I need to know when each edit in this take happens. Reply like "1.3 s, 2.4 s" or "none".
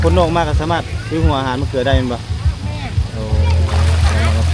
none